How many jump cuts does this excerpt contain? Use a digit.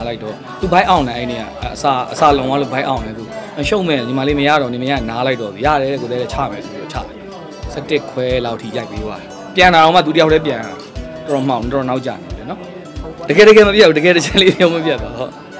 1